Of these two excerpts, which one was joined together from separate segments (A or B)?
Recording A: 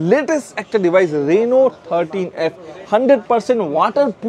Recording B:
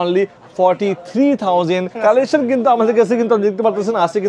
B